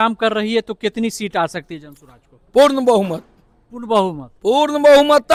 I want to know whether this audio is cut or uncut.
uncut